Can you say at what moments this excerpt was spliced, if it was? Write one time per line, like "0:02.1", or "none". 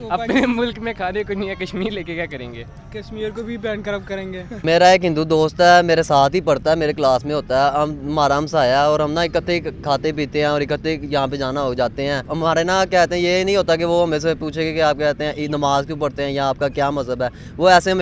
0:04.6
0:12.3